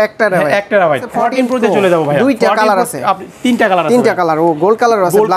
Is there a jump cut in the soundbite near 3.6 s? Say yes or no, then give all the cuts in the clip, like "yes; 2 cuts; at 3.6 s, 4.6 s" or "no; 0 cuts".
no; 1 cut; at 1.1 s